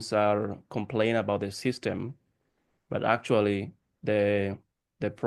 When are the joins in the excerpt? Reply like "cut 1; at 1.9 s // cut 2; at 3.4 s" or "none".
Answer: none